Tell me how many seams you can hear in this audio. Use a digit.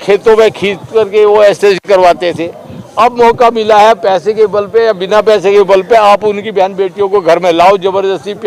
0